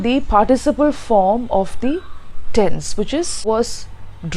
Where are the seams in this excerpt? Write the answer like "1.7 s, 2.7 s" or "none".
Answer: 3.4 s